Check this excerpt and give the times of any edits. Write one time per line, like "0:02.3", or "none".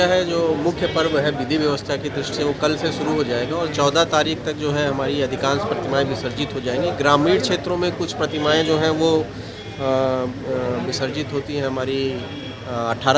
none